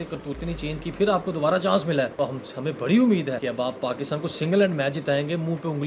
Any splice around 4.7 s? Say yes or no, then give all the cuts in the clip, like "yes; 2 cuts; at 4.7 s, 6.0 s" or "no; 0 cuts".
no; 2 cuts; at 2.1 s, 3.4 s